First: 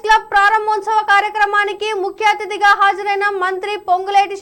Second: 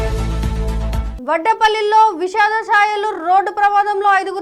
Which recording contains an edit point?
second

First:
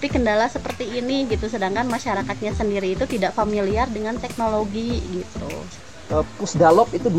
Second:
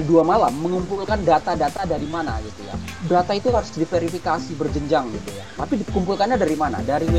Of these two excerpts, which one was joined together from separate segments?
first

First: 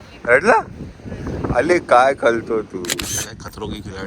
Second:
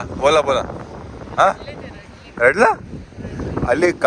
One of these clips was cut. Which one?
first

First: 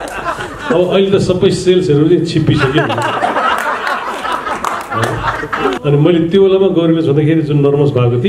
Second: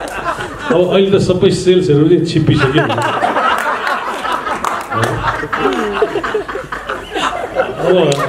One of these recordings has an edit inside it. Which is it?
first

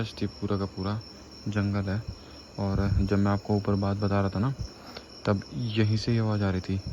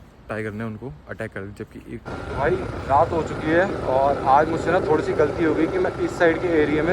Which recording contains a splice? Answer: second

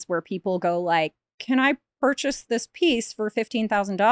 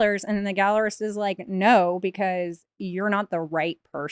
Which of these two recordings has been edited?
first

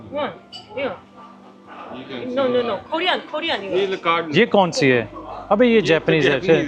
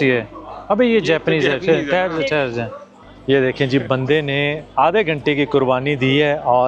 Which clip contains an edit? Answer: second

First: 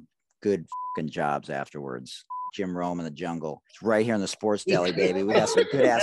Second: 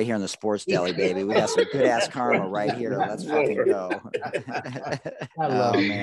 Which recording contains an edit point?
first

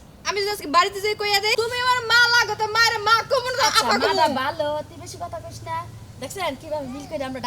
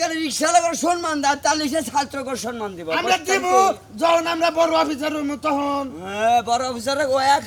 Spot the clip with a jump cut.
first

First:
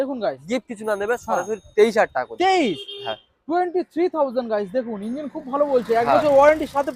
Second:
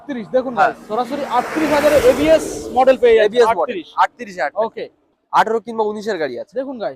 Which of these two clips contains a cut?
second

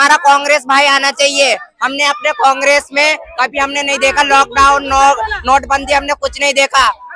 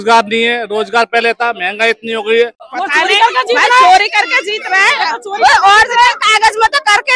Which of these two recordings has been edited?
second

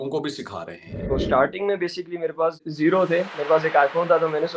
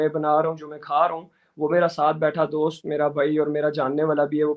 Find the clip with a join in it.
first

